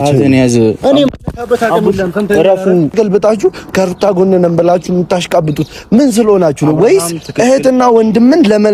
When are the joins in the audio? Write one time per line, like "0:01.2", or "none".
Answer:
0:02.9